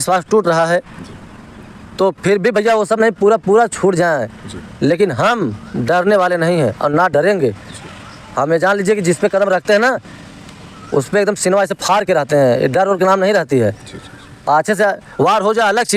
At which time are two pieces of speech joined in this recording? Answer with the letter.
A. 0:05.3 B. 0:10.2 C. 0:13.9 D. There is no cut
D